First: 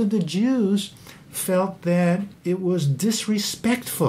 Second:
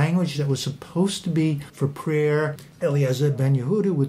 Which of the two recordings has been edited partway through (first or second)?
second